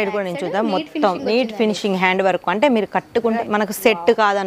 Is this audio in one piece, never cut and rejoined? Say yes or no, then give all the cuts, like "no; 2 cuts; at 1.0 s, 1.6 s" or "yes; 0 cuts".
no; 1 cut; at 3.4 s